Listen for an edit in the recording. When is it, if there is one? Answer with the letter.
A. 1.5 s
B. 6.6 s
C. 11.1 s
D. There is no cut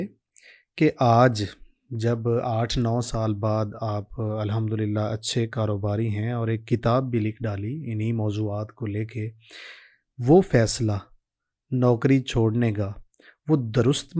D